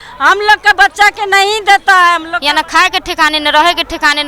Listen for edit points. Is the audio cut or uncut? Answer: cut